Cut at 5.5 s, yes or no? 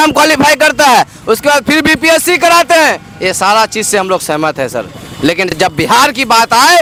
no